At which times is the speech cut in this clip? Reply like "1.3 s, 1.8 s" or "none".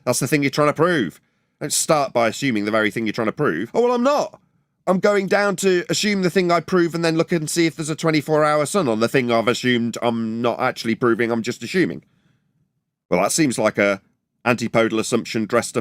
none